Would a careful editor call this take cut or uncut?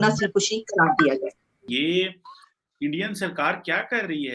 cut